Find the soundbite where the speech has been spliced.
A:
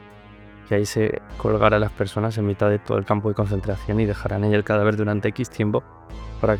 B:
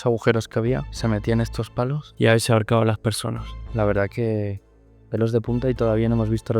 B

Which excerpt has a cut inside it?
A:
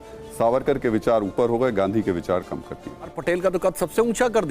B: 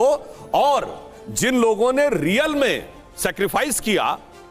A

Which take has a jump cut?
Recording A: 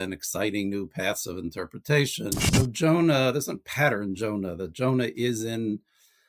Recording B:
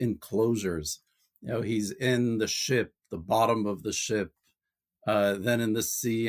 A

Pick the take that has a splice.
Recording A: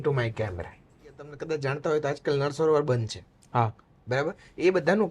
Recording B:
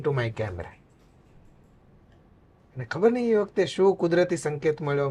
A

